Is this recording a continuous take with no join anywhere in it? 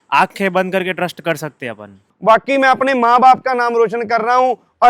no; 1 cut; at 2.1 s

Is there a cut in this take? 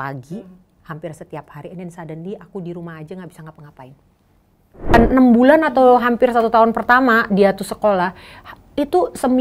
yes; 1 cut; at 4.9 s

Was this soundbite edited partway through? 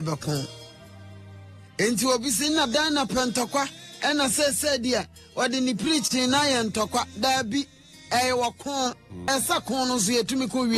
yes; 1 cut; at 9.3 s

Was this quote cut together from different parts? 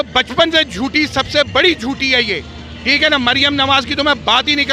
no; 0 cuts

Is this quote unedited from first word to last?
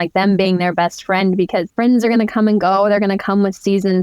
no; 1 cut; at 1.7 s

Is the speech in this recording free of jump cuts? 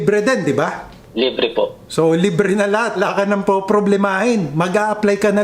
no; 2 cuts; at 1.5 s, 3.0 s

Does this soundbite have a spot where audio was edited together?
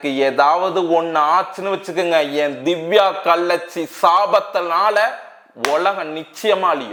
no; 0 cuts

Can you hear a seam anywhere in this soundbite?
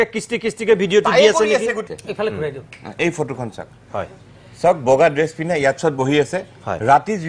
yes; 1 cut; at 1.8 s

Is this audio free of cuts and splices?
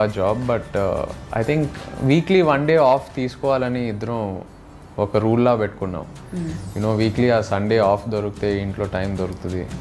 yes; 0 cuts

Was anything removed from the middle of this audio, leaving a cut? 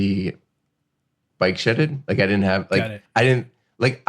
yes; 2 cuts; at 1.2 s, 3.0 s

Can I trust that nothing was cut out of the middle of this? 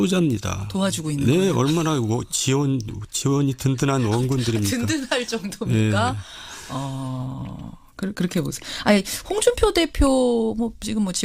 yes; 0 cuts

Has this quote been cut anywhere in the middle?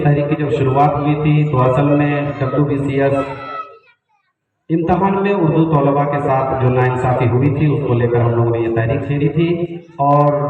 no; 0 cuts

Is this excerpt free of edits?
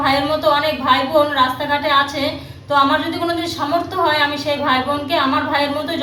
yes; 0 cuts

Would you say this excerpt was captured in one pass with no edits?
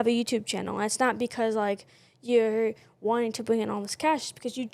yes; 0 cuts

